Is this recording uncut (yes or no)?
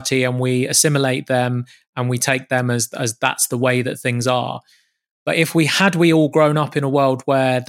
yes